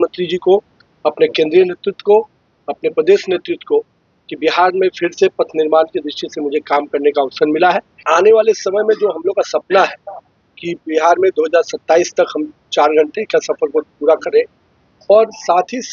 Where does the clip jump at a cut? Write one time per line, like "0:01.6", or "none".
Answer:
0:08.0